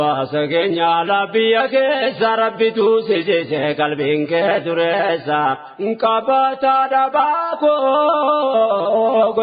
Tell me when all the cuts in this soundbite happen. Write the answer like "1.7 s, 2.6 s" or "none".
none